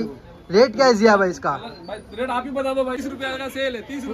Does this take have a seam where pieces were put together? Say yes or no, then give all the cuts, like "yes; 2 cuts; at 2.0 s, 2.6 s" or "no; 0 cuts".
yes; 1 cut; at 3.1 s